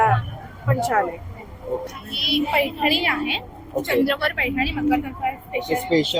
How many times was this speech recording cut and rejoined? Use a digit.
1